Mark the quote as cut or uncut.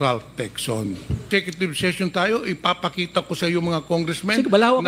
cut